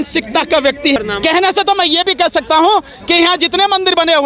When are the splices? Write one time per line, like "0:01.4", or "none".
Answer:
0:01.0

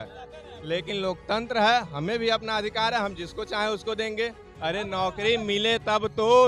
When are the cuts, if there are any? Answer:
0:04.5

